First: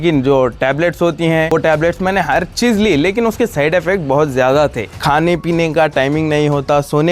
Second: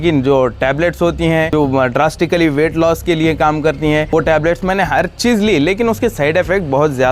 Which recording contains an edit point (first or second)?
first